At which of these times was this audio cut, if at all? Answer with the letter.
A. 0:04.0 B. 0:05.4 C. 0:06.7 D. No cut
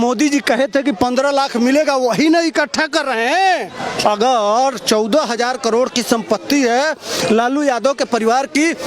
A